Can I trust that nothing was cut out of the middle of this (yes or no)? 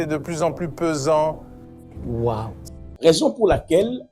no